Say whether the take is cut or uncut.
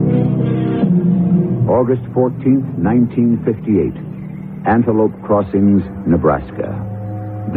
uncut